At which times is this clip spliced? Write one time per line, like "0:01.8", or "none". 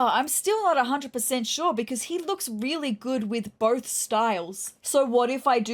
none